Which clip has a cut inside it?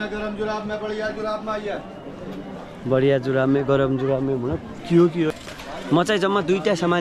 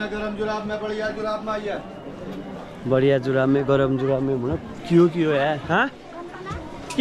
first; 1 cut; at 5.3 s

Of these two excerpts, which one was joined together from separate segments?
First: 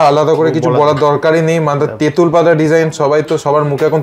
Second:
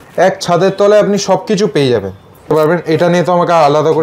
second; 1 cut; at 2.5 s

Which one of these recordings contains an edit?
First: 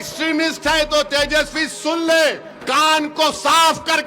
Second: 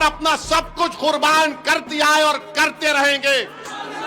first; 1 cut; at 2.5 s

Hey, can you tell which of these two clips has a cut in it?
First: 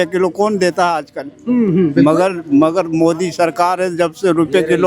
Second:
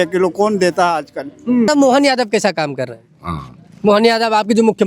second; 1 cut; at 1.7 s

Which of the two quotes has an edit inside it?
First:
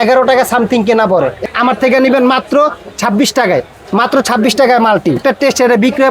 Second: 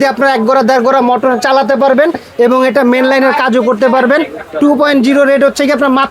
first; 2 cuts; at 1.4 s, 5.2 s

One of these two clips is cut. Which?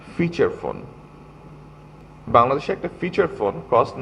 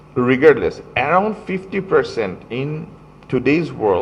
first; 1 cut; at 2.0 s

